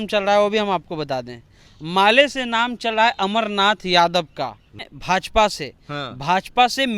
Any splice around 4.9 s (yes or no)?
yes